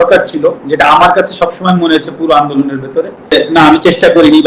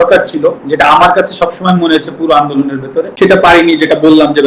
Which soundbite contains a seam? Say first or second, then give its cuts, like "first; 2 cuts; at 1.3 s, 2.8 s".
second; 1 cut; at 3.1 s